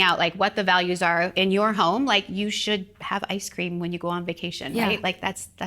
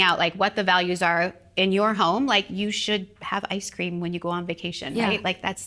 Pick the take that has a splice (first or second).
first